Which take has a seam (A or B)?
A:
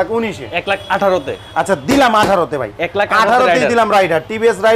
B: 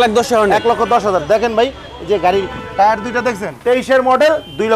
B